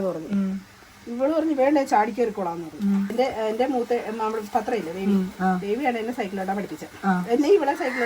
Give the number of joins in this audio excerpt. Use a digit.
1